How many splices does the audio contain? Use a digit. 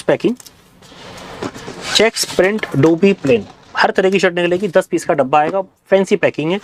0